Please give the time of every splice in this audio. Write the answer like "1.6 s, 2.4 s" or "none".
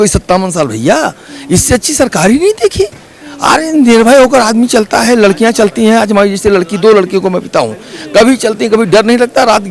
none